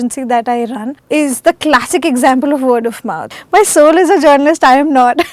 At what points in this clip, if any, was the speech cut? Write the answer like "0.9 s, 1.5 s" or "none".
0.9 s, 3.3 s